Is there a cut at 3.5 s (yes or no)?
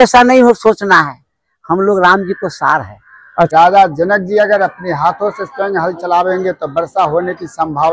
yes